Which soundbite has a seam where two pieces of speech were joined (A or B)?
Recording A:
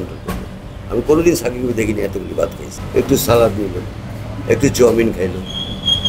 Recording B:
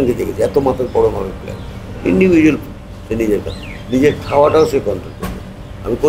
A